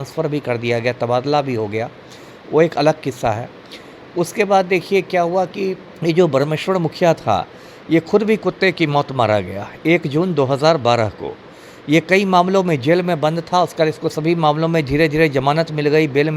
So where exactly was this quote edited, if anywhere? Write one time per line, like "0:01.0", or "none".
none